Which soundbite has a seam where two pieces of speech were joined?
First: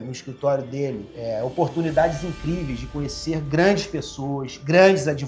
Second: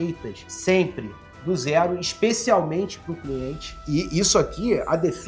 second; 1 cut; at 3.7 s

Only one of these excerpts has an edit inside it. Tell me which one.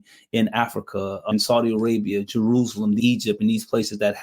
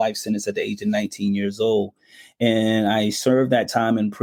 first; 2 cuts; at 1.2 s, 3.0 s

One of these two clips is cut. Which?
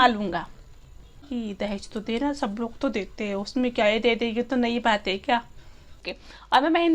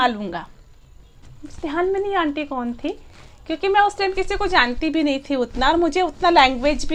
first; 2 cuts; at 1.3 s, 6.0 s

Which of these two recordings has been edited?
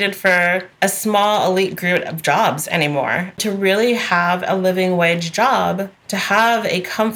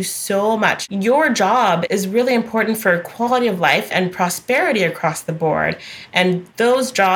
second; 3 cuts; at 0.8 s, 1.8 s, 3.9 s

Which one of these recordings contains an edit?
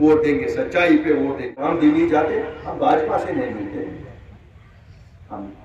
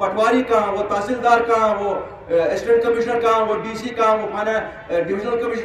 first; 1 cut; at 1.6 s

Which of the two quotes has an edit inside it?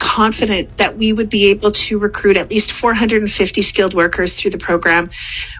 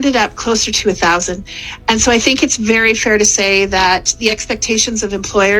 second; 1 cut; at 1.4 s

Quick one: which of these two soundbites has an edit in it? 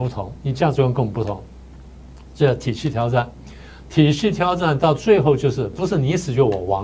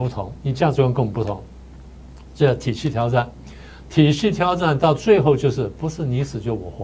first; 1 cut; at 5.8 s

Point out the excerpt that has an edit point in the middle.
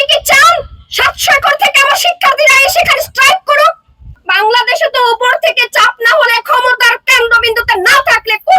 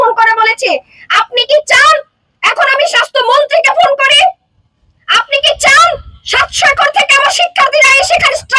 first; 1 cut; at 4.2 s

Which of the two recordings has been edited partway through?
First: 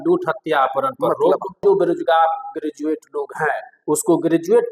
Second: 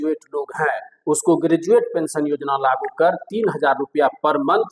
first; 1 cut; at 1.6 s

